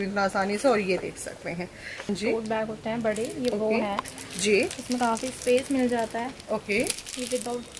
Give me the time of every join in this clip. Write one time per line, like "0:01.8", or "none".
0:02.1